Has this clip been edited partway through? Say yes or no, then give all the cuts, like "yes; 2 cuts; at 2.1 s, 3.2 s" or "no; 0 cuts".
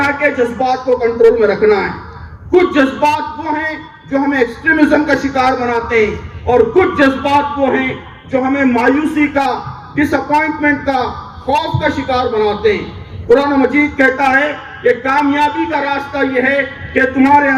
no; 0 cuts